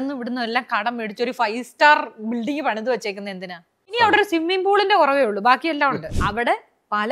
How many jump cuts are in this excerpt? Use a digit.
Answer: 2